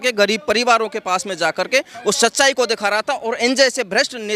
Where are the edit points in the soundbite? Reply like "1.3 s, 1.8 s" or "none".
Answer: none